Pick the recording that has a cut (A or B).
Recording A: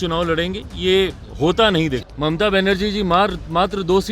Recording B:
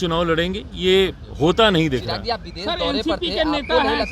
A